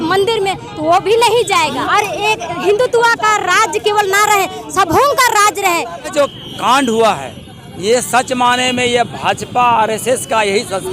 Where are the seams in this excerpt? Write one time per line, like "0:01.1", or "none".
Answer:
0:01.8
0:06.1